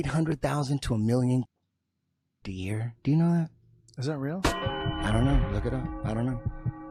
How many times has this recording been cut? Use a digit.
0